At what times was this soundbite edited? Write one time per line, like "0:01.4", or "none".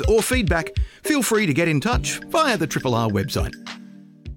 0:03.5